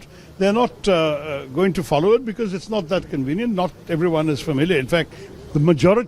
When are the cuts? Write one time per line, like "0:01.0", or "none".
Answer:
none